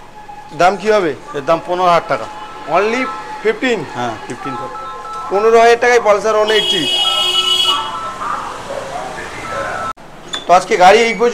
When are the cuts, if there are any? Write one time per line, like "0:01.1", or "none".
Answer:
none